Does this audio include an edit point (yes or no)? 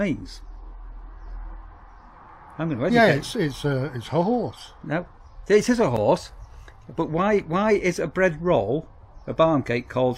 no